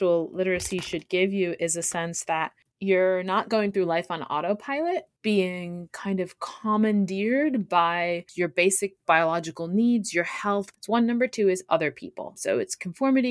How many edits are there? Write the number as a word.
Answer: five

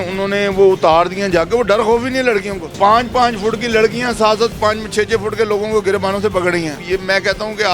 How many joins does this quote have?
two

